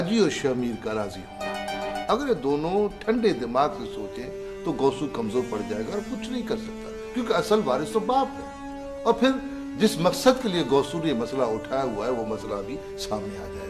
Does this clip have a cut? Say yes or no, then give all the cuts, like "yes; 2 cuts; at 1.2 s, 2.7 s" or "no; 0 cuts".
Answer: yes; 1 cut; at 11.5 s